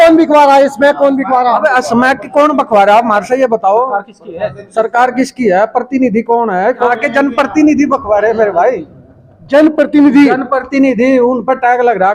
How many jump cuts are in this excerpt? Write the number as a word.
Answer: one